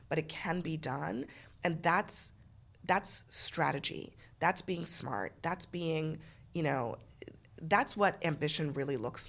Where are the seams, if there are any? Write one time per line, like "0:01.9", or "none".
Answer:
none